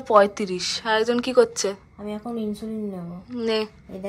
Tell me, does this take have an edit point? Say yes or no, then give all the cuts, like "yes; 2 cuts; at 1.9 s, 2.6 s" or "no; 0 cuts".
no; 0 cuts